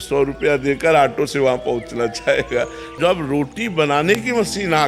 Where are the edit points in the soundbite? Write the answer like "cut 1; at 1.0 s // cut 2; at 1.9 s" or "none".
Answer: cut 1; at 2.9 s